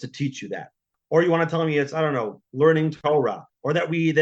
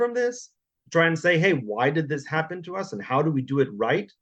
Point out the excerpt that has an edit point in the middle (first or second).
first